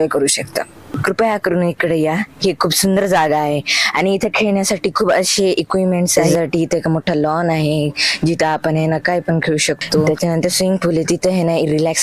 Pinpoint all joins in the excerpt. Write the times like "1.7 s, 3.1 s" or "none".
0.9 s, 6.2 s, 10.1 s